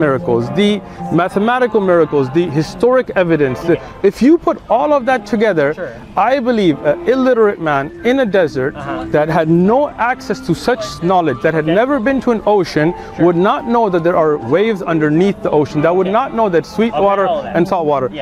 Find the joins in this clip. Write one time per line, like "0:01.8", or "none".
none